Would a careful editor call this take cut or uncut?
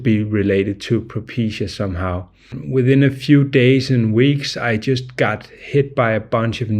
cut